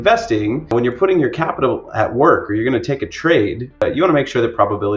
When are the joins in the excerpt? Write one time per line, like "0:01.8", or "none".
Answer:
0:00.7
0:03.8